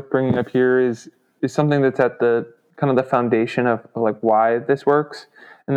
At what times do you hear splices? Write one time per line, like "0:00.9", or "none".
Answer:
none